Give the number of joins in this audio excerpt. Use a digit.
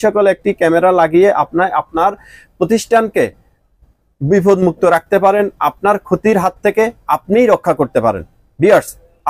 0